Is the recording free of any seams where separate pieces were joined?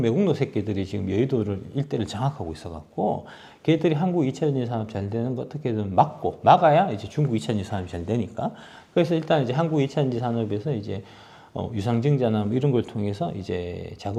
yes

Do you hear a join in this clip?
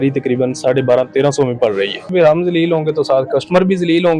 yes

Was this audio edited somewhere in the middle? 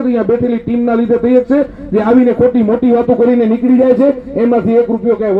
no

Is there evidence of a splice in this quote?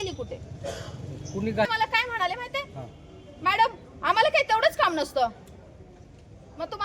yes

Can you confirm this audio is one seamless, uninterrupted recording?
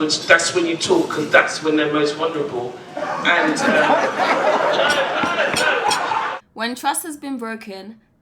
no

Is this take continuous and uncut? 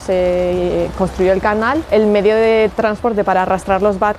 no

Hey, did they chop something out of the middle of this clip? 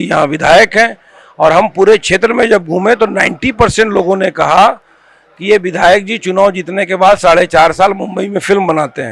no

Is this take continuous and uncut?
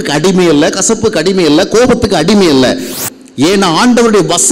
no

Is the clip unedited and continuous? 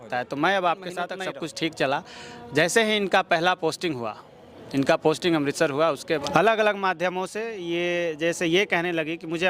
no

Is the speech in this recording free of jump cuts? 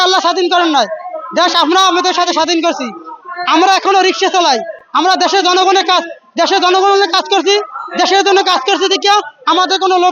yes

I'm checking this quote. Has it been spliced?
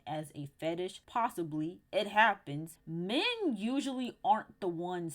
yes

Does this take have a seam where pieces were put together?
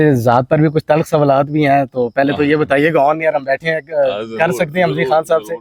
no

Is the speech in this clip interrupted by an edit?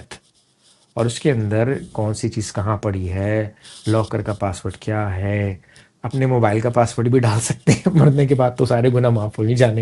no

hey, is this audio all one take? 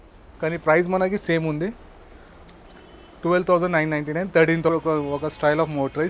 no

